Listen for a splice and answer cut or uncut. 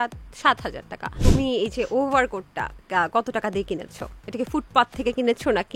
cut